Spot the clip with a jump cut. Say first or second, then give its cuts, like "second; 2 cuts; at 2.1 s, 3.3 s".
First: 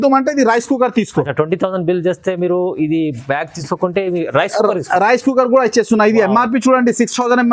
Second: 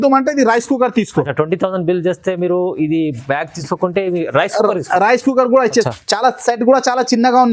second; 1 cut; at 5.9 s